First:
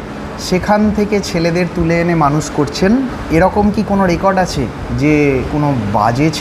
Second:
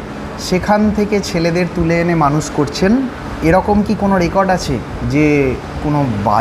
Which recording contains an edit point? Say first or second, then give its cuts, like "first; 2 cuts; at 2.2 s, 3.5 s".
first; 2 cuts; at 3.2 s, 5.5 s